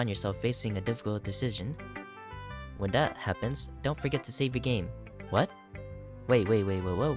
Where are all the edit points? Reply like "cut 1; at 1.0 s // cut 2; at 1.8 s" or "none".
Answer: cut 1; at 5.0 s